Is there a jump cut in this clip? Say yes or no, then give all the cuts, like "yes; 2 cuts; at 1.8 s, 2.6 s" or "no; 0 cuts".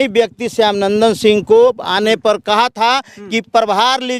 no; 0 cuts